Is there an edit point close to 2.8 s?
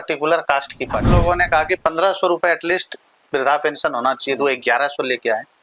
no; 1 cut; at 1.1 s

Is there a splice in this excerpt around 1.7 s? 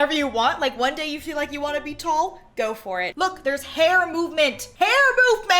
no; 1 cut; at 3.1 s

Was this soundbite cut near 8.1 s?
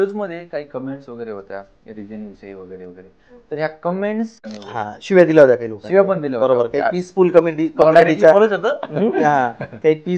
no; 1 cut; at 4.4 s

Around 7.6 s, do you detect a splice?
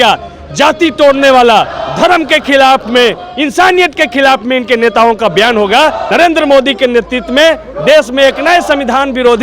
no; 1 cut; at 6.0 s

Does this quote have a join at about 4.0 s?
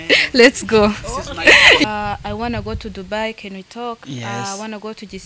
no; 1 cut; at 1.8 s

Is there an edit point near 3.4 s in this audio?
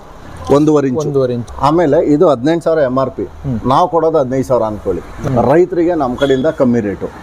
no; 2 cuts; at 1.4 s, 5.1 s

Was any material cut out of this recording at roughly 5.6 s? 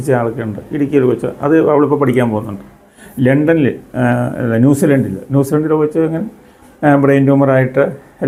no; 0 cuts

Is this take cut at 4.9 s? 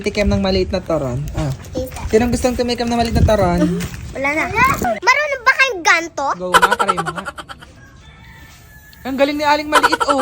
yes; 1 cut; at 4.9 s

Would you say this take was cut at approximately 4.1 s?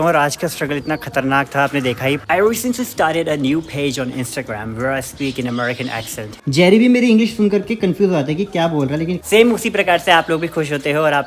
no; 3 cuts; at 2.2 s, 6.3 s, 9.2 s

